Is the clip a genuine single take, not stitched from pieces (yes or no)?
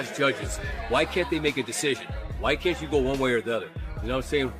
yes